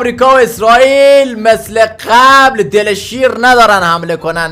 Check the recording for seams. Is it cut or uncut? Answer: uncut